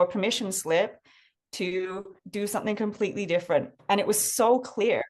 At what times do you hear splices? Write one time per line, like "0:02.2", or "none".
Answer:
0:02.2
0:03.7